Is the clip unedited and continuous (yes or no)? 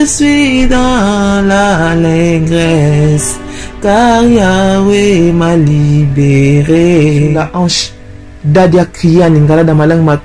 no